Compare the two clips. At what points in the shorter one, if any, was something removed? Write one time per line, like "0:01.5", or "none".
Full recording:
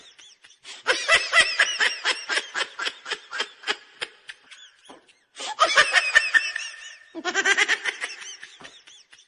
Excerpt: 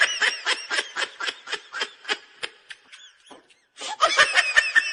none